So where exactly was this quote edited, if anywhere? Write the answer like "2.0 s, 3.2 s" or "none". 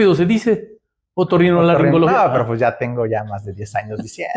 none

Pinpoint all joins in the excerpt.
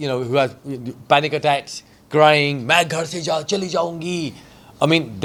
none

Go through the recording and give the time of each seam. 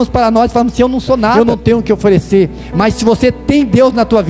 1.3 s

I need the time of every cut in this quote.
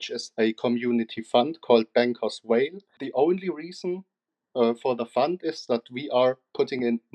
3.0 s

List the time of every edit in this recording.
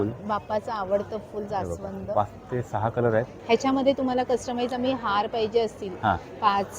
3.3 s

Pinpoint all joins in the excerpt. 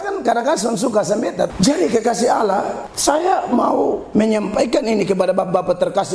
1.5 s, 2.8 s, 4.0 s

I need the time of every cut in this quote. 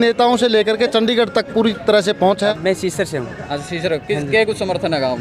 2.6 s

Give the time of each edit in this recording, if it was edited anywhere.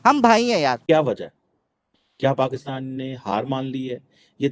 1.0 s

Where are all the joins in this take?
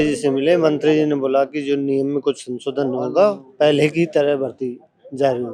none

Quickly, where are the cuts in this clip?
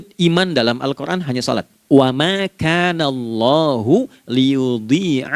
1.7 s

